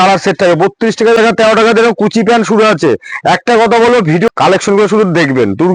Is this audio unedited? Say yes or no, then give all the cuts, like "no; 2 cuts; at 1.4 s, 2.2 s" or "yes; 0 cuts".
no; 2 cuts; at 1.2 s, 4.3 s